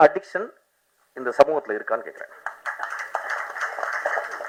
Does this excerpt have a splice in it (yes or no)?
no